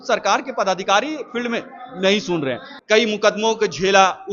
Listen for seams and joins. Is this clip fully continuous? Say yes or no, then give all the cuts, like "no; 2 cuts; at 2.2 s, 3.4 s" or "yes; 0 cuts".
no; 1 cut; at 2.7 s